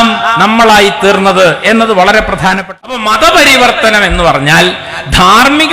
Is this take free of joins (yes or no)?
no